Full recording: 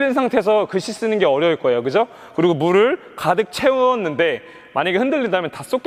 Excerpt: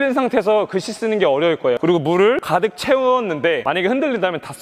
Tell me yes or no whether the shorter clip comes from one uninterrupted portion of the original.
no